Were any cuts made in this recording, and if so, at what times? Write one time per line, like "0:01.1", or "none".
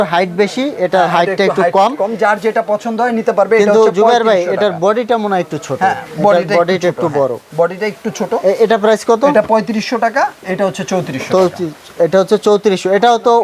none